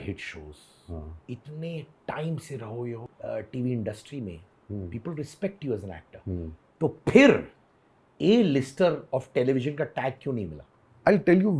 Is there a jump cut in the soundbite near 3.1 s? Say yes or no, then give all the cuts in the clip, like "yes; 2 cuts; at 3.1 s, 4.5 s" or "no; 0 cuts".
yes; 1 cut; at 3.1 s